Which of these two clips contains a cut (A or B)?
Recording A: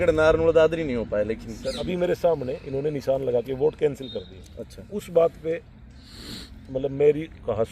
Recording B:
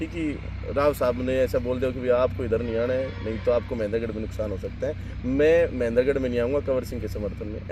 A